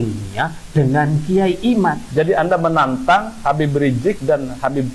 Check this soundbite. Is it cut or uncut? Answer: cut